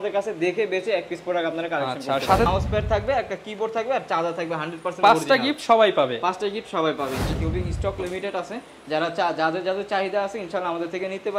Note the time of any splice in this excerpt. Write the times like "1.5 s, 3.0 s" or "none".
2.5 s, 7.3 s